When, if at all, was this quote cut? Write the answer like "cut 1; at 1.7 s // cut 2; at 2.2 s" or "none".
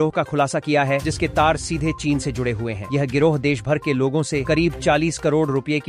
none